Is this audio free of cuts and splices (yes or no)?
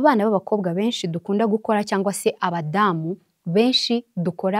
yes